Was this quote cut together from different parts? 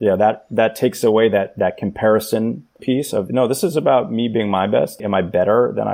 yes; 2 cuts; at 2.8 s, 5.0 s

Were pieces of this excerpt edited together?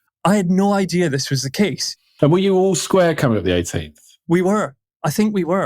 yes; 2 cuts; at 2.2 s, 4.3 s

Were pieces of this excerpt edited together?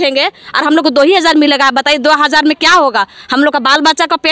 no; 0 cuts

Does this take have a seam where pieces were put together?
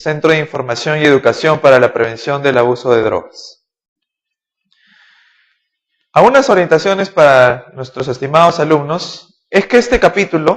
yes; 1 cut; at 8.4 s

